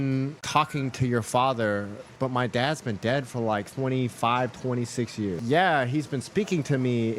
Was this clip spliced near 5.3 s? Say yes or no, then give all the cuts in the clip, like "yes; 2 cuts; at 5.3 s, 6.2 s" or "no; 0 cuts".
yes; 3 cuts; at 2.1 s, 3.7 s, 5.3 s